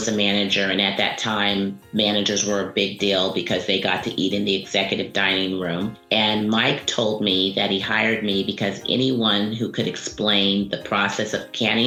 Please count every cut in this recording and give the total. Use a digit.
0